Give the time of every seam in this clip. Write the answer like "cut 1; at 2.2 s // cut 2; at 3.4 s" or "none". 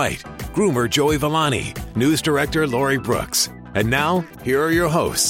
cut 1; at 4.3 s